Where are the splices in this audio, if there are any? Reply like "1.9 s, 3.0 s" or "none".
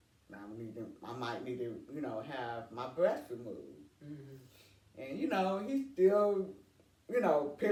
none